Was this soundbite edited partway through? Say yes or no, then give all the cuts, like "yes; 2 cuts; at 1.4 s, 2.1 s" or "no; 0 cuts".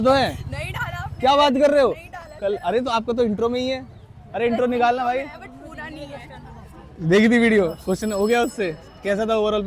no; 0 cuts